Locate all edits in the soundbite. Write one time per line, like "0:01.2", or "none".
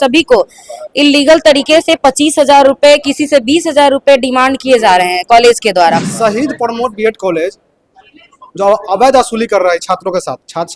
0:06.1